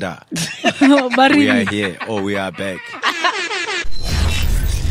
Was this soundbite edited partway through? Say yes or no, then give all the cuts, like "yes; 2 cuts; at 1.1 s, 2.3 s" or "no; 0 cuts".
yes; 1 cut; at 3.8 s